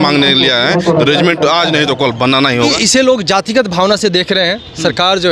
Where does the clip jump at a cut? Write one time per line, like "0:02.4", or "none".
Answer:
0:02.7